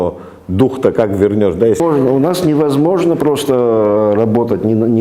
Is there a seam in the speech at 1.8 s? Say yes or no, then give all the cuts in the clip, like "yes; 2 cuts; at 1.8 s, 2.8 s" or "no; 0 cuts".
yes; 1 cut; at 1.8 s